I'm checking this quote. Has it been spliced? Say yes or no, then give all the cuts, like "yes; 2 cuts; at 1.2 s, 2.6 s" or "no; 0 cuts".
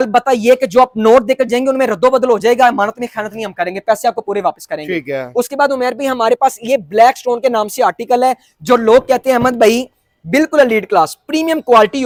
no; 0 cuts